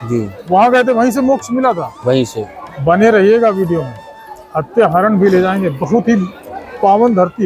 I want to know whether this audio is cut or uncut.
uncut